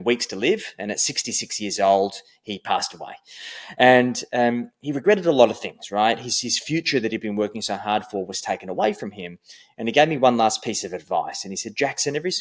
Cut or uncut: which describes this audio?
uncut